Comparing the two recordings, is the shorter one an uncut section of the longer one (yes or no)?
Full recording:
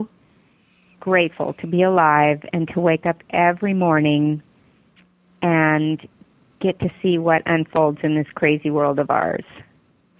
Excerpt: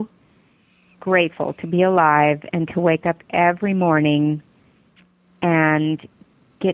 yes